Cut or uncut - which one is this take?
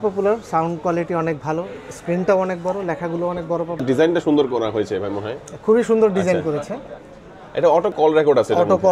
cut